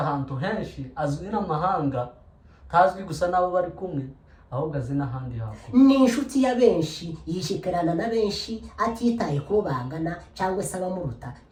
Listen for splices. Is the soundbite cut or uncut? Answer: uncut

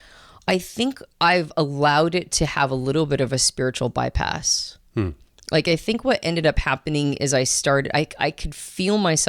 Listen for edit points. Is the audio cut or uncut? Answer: uncut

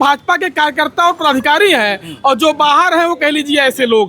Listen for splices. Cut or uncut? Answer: uncut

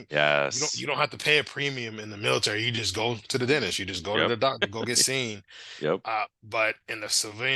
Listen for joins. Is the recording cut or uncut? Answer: cut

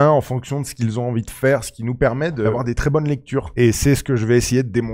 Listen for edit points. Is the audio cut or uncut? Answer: cut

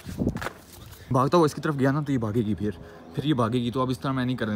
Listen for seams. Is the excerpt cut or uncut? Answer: cut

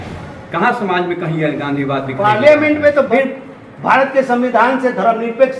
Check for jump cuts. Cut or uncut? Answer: cut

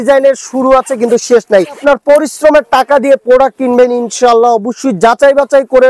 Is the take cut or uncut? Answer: cut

